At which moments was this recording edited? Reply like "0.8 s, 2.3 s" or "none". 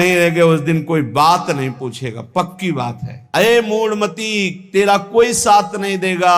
3.2 s